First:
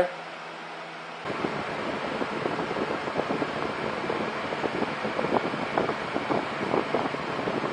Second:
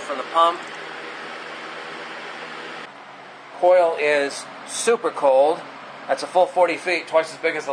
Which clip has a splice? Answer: second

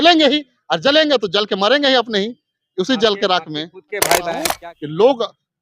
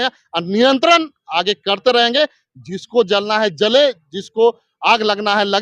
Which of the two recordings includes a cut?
first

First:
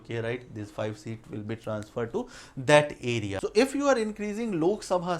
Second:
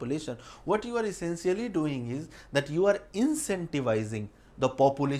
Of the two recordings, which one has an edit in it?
first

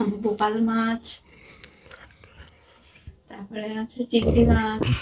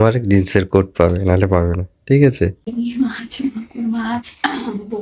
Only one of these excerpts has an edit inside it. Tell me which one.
second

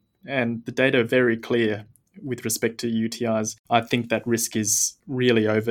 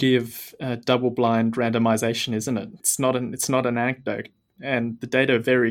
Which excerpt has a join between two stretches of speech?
second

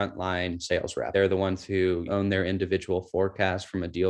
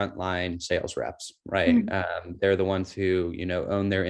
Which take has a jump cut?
first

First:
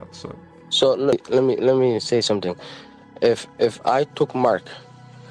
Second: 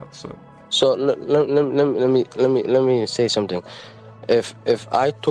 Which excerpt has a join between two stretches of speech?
first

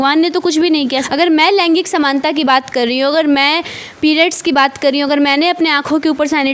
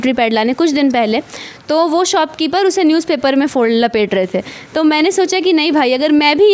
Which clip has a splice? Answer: first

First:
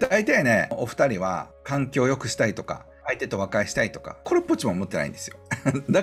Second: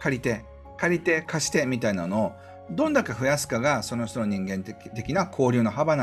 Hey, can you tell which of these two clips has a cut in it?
first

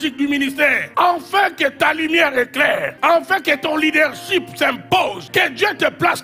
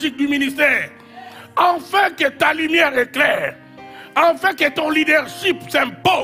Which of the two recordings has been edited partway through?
first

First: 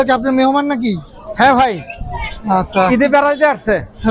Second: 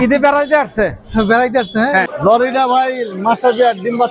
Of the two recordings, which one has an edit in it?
second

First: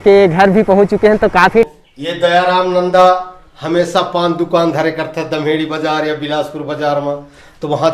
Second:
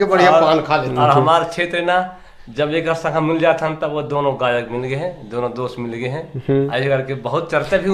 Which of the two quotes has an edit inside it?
first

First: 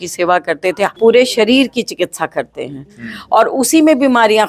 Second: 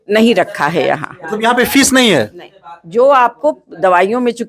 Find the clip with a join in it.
first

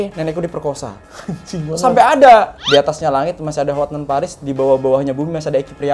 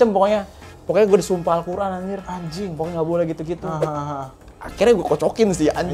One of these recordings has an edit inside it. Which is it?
first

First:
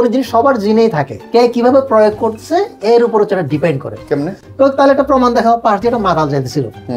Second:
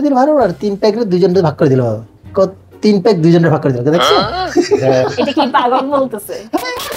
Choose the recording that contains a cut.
first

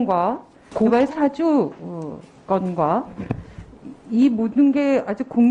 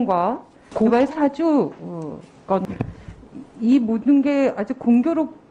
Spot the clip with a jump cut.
second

